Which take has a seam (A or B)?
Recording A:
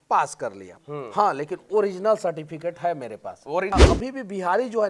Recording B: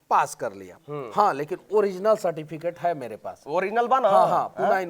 A